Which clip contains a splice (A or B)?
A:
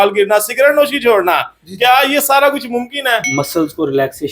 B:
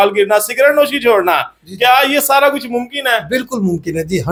A